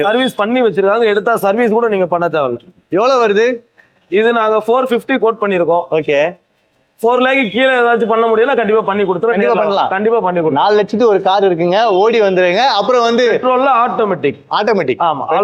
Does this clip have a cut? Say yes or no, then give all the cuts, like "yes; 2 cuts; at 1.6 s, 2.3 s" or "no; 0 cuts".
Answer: no; 0 cuts